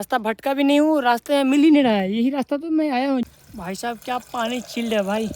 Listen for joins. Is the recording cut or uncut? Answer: cut